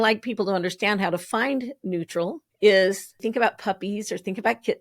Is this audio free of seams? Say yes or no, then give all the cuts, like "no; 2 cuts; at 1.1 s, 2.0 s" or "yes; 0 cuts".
no; 2 cuts; at 2.4 s, 3.2 s